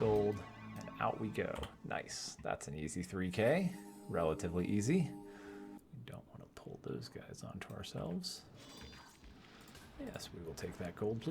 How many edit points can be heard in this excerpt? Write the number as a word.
one